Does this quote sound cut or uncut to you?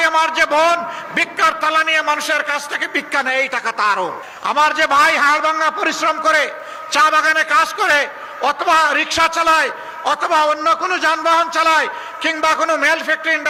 uncut